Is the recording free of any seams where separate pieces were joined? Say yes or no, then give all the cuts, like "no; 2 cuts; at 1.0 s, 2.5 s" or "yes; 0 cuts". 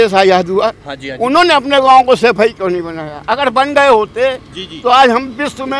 yes; 0 cuts